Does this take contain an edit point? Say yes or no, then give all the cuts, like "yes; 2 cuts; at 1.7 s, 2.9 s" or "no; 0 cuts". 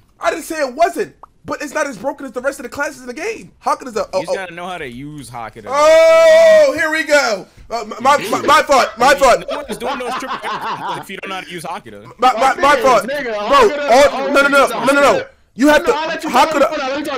no; 0 cuts